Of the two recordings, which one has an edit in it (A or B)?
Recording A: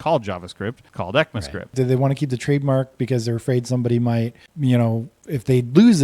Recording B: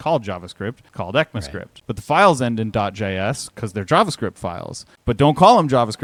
A